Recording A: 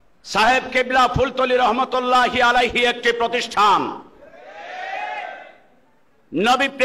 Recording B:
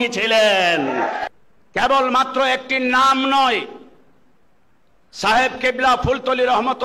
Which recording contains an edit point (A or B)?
B